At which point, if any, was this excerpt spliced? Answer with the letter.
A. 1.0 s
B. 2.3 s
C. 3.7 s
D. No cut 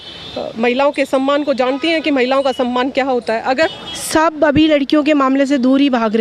C